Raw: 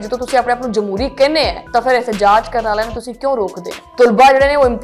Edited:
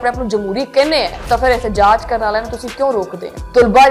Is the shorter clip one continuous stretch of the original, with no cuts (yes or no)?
yes